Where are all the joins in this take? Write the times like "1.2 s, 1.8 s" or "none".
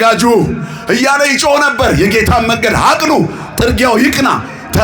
none